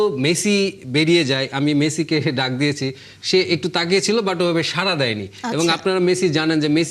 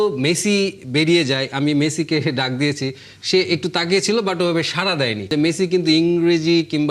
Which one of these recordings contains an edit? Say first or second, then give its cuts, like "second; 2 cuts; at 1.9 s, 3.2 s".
second; 1 cut; at 5.3 s